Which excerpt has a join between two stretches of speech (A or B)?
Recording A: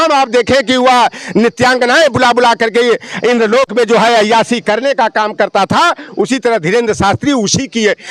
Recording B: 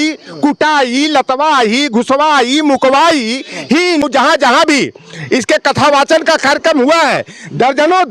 B